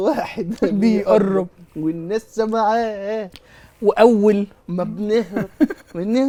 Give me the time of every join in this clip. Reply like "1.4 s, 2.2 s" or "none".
none